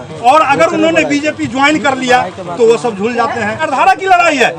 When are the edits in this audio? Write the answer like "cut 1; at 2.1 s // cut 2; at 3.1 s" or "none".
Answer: cut 1; at 3.6 s